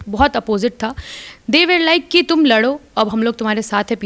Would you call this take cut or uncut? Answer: uncut